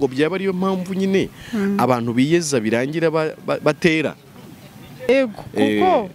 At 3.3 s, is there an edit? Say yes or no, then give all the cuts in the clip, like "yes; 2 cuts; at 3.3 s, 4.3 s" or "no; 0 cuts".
no; 1 cut; at 5.1 s